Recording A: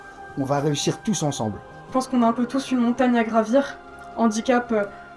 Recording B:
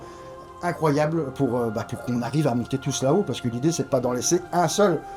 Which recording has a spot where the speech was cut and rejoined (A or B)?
A